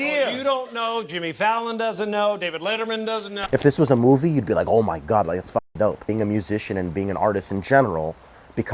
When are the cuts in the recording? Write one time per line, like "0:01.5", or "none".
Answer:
0:03.4
0:06.0